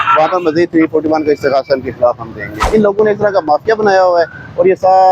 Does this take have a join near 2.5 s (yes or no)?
yes